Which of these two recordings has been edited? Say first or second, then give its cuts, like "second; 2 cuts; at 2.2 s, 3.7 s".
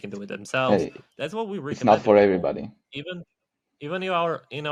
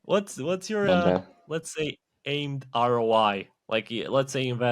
second; 1 cut; at 3.5 s